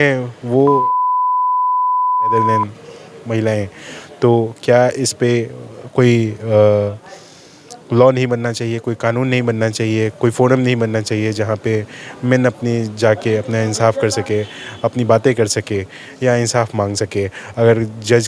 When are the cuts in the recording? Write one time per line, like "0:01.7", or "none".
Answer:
none